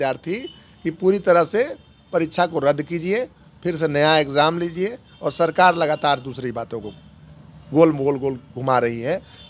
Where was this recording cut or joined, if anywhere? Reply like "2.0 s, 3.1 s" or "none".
none